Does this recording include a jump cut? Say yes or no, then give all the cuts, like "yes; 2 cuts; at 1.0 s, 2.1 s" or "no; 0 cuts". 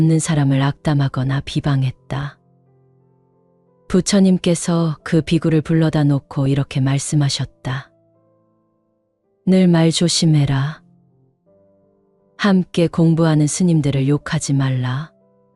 yes; 2 cuts; at 10.8 s, 12.4 s